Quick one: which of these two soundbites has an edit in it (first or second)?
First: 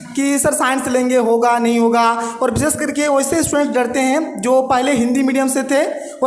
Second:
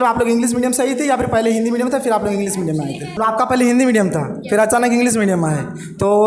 second